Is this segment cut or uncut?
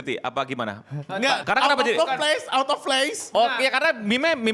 uncut